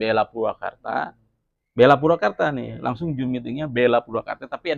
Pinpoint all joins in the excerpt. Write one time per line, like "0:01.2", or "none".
none